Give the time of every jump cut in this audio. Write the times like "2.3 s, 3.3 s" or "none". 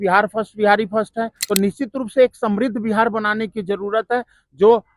1.3 s